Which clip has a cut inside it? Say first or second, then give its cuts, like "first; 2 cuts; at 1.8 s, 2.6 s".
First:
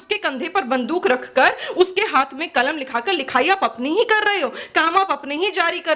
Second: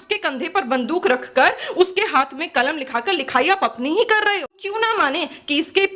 second; 1 cut; at 4.7 s